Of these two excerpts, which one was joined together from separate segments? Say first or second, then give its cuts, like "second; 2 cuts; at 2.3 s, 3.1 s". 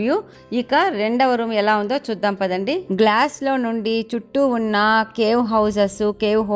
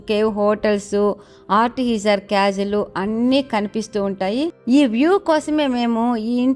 first; 1 cut; at 2.8 s